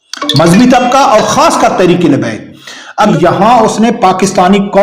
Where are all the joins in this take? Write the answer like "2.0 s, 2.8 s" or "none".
3.1 s